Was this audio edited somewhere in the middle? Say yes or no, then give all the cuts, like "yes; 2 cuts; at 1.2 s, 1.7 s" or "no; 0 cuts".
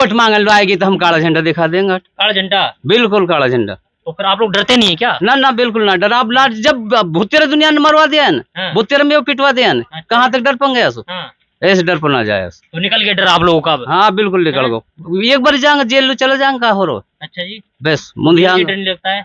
no; 0 cuts